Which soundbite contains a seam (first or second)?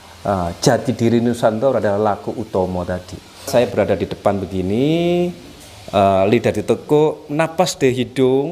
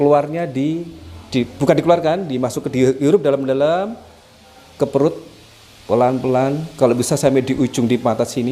first